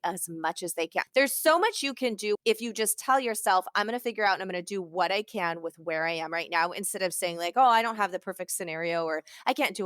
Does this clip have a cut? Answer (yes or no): yes